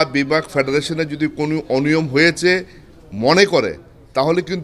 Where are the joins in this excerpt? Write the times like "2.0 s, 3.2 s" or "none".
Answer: none